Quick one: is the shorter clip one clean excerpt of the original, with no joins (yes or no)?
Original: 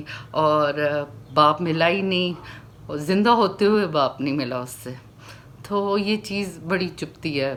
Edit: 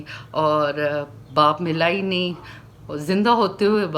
yes